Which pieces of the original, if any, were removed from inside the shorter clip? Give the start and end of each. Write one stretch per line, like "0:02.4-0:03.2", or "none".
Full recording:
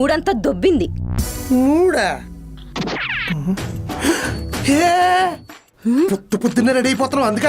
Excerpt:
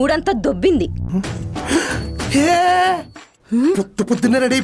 0:01.0-0:03.3